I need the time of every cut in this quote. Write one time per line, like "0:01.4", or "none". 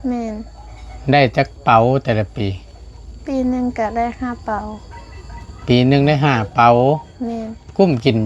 none